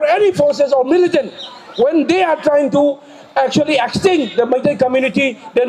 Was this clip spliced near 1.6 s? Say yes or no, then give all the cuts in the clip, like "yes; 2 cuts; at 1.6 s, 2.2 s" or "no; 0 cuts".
no; 0 cuts